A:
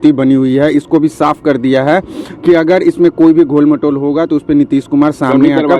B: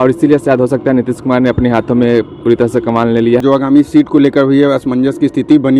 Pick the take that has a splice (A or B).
B